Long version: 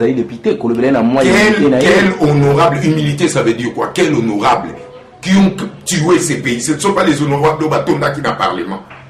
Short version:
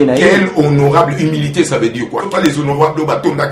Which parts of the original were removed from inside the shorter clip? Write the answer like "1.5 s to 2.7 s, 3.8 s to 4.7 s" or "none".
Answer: 3.9 s to 6.9 s